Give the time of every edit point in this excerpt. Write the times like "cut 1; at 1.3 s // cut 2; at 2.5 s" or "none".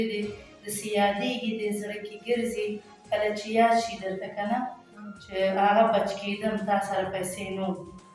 none